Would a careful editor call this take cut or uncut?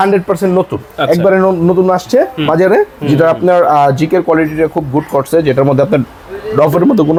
uncut